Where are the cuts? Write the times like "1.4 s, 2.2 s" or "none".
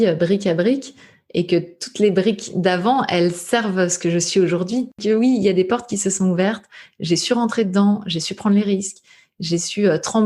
5.0 s